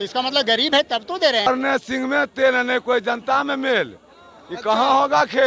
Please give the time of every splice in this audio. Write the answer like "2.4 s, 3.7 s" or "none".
1.5 s